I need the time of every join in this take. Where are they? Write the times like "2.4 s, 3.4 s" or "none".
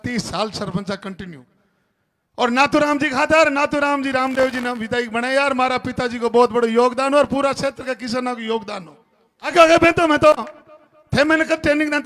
9.5 s